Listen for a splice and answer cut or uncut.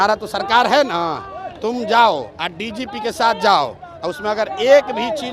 uncut